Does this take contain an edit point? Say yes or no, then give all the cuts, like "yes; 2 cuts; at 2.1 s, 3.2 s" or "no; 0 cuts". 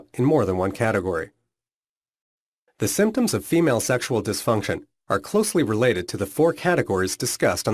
yes; 1 cut; at 4.2 s